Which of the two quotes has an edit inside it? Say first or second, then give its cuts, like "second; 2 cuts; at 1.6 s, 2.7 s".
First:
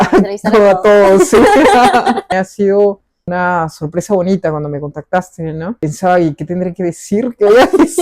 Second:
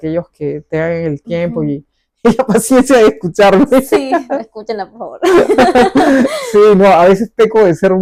first; 3 cuts; at 2.3 s, 3.2 s, 5.8 s